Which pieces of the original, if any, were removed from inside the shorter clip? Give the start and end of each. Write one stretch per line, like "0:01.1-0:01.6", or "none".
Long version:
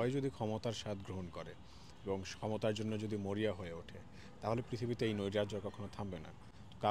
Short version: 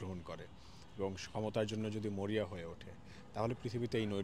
none